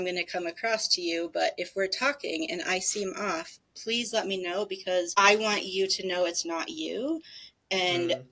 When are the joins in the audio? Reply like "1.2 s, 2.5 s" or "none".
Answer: 5.1 s

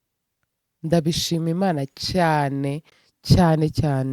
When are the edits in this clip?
none

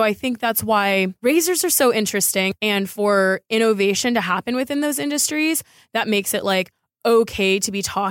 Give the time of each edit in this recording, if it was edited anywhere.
1.1 s, 2.5 s

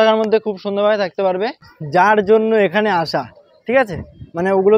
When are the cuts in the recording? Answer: 1.7 s

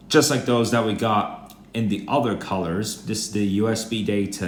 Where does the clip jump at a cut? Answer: none

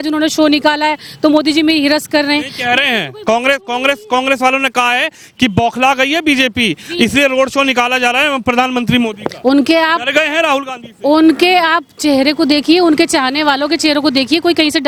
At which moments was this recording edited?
none

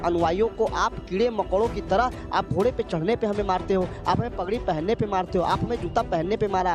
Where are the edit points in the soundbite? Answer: none

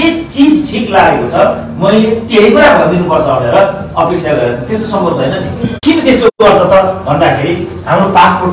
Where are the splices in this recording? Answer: 5.7 s

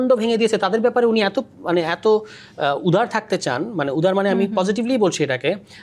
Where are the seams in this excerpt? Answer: none

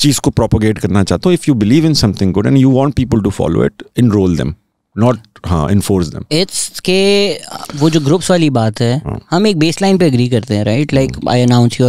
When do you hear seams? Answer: none

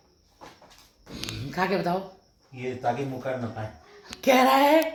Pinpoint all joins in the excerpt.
none

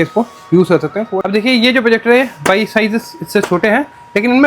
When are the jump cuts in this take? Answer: 1.1 s

